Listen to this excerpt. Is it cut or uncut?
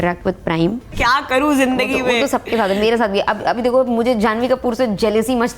cut